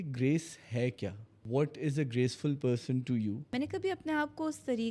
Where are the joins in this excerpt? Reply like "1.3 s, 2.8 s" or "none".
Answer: 1.4 s, 3.5 s